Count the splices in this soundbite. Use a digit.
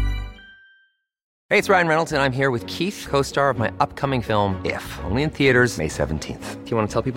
1